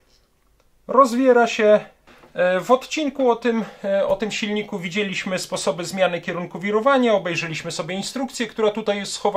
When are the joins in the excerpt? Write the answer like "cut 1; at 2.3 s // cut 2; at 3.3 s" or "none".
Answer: cut 1; at 2.0 s

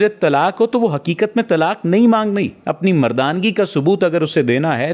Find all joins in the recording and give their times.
cut 1; at 2.6 s

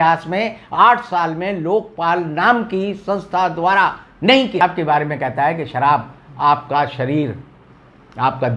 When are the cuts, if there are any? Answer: cut 1; at 4.6 s

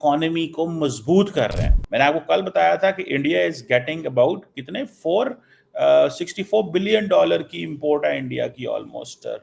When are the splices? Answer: cut 1; at 1.7 s

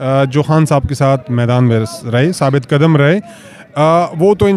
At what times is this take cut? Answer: none

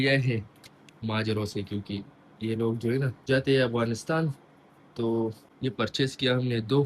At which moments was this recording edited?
cut 1; at 3.2 s // cut 2; at 5.5 s

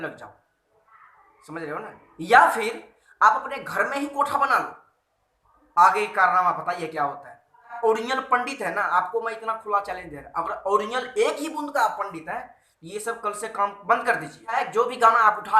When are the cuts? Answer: cut 1; at 7.8 s // cut 2; at 14.5 s

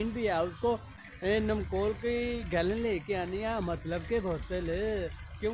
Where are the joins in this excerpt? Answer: cut 1; at 1.0 s

